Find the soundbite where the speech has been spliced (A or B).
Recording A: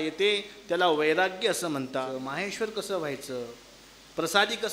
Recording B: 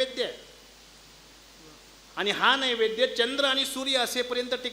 A